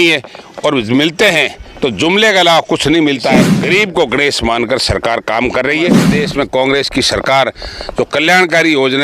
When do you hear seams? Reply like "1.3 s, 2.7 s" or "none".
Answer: 3.5 s, 6.1 s